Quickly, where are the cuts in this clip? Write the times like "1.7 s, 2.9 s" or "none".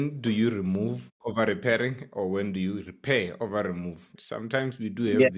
4.2 s

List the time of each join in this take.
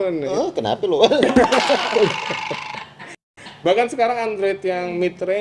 none

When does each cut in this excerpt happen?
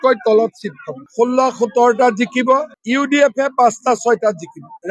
1.0 s, 2.8 s

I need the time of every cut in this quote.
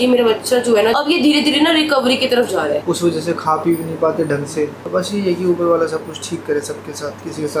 0.9 s, 2.8 s, 4.8 s

